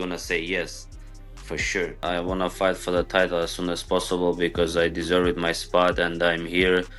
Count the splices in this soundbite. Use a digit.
1